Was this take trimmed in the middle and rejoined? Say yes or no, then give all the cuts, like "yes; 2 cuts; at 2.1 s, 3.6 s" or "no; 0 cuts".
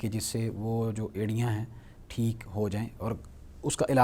no; 0 cuts